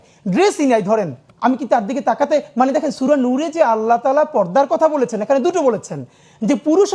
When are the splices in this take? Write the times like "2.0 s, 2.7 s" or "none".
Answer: 1.2 s

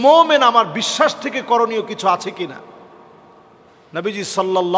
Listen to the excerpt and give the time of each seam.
none

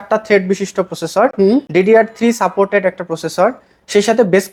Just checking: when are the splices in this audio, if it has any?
none

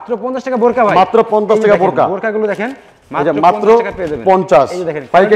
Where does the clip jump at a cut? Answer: none

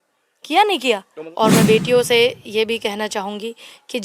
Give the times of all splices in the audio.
1.2 s

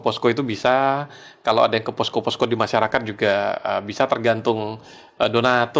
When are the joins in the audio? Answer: none

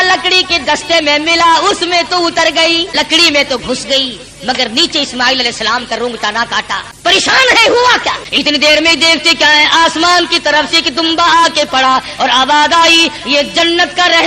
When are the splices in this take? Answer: 2.9 s, 6.9 s, 8.2 s

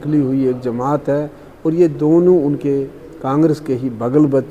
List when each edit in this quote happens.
none

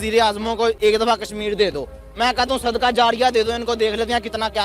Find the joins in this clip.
none

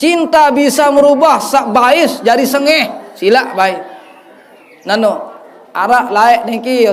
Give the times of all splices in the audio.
none

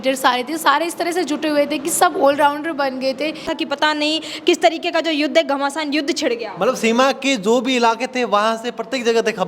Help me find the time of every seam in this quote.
3.5 s

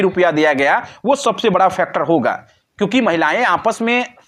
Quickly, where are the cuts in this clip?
none

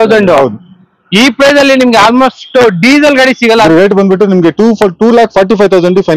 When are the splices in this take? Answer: 3.7 s

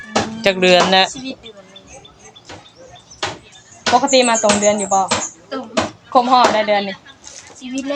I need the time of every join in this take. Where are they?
none

